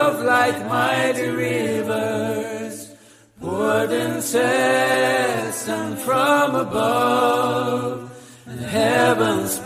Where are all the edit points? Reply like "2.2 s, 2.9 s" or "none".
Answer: 4.9 s